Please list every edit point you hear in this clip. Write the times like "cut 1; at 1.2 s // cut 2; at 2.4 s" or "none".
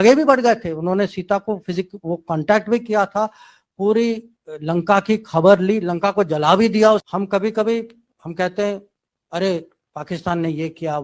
cut 1; at 7.0 s